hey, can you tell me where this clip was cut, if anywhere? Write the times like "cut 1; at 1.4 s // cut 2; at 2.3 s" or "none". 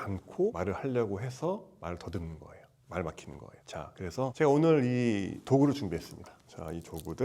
none